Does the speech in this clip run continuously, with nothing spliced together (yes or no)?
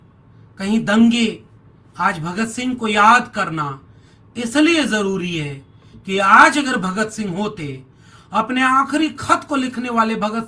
yes